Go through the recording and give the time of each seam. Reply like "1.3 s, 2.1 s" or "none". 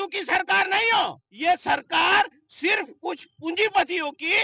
1.2 s